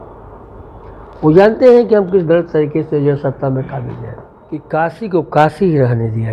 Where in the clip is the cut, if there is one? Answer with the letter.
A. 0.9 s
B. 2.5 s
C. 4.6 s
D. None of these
C